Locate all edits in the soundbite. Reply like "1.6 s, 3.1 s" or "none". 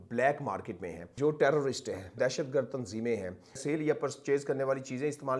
1.1 s, 2.2 s, 3.6 s